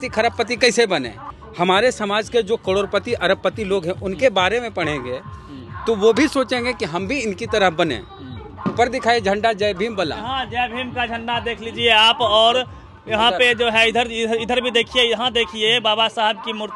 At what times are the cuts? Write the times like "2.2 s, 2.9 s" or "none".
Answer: none